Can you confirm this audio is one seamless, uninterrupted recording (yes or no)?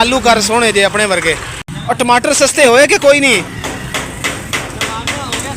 no